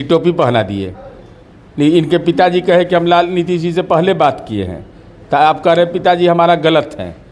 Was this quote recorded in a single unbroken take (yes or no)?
yes